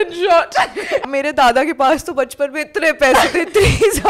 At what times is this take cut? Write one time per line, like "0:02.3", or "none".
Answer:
0:01.1